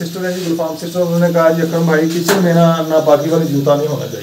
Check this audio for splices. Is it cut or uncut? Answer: uncut